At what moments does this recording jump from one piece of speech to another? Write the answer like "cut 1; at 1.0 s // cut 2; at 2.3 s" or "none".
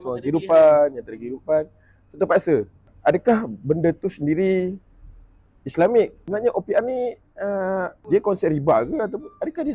cut 1; at 2.8 s // cut 2; at 6.2 s // cut 3; at 8.0 s